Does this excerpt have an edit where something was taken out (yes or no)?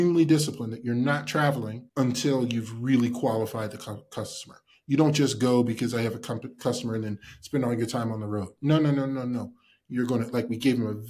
yes